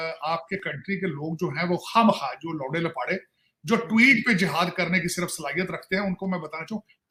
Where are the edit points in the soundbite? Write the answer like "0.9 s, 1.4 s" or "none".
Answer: none